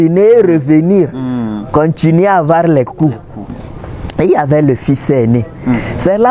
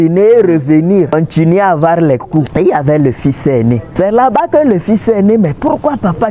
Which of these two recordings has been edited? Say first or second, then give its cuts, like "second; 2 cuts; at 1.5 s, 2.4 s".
second; 3 cuts; at 1.1 s, 2.5 s, 3.9 s